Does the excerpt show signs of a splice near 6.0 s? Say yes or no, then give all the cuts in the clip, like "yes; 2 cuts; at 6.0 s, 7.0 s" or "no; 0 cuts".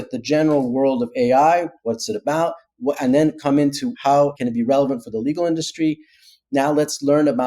no; 1 cut; at 4.1 s